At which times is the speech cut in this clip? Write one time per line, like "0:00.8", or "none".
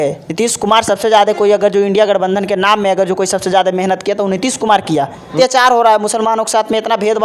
0:05.3